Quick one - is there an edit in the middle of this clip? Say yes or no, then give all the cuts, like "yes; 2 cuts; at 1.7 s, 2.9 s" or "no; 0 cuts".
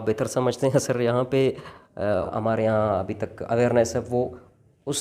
yes; 1 cut; at 2.3 s